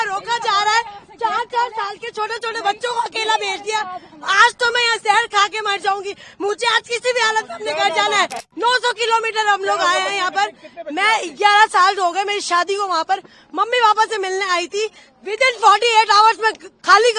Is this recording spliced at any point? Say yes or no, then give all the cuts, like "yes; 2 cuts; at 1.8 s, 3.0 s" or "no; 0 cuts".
yes; 1 cut; at 8.5 s